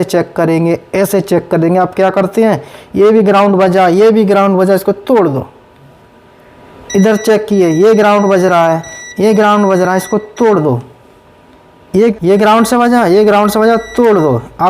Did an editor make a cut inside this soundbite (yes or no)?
yes